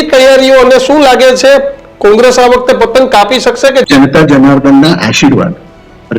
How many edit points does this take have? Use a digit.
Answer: 1